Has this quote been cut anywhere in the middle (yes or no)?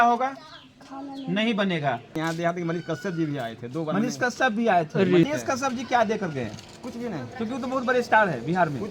yes